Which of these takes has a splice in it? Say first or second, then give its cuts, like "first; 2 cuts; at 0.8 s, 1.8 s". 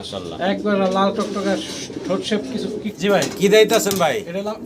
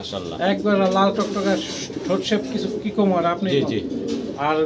first; 1 cut; at 2.9 s